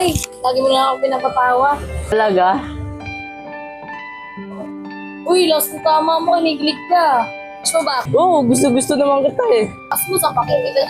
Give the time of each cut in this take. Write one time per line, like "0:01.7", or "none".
0:10.0